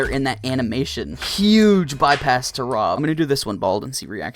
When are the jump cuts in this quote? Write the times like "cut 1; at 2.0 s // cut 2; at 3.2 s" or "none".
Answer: cut 1; at 1.2 s // cut 2; at 3.0 s